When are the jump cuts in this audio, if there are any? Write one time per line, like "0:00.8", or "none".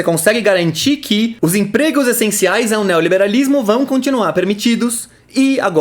0:01.3